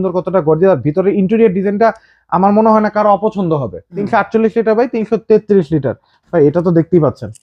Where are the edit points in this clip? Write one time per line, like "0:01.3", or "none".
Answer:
0:03.9

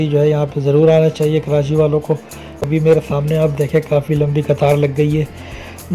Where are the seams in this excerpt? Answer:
0:02.6

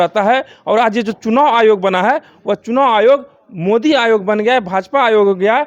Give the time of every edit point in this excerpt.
none

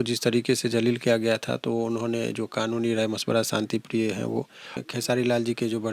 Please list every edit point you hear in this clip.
0:04.8

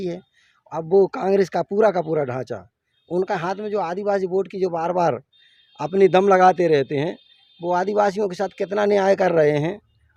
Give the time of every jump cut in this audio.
none

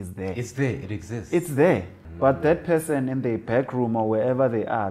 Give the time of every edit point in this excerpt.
0:02.0

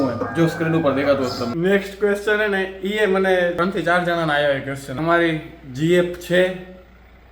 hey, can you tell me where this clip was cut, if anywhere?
0:01.5
0:03.6
0:04.9

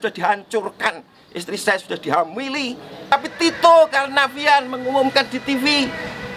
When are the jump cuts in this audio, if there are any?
0:03.1

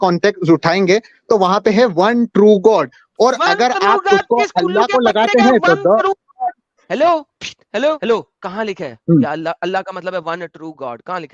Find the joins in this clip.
0:08.0

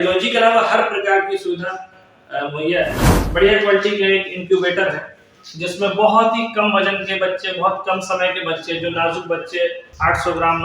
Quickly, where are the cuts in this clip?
0:03.1

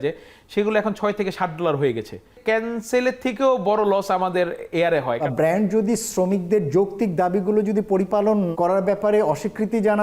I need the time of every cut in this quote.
0:05.2
0:08.5

